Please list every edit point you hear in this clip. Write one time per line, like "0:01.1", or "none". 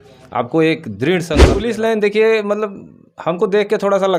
0:01.6